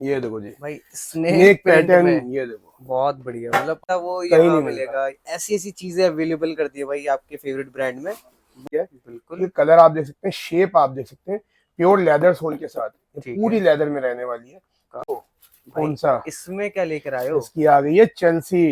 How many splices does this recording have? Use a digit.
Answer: 3